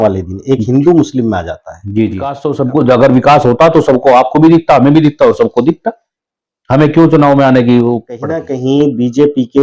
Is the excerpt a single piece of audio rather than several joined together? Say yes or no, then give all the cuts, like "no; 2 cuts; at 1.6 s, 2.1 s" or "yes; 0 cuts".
no; 2 cuts; at 2.4 s, 8.5 s